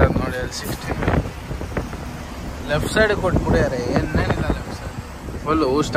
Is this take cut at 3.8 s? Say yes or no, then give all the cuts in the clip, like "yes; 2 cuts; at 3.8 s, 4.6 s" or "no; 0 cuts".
no; 0 cuts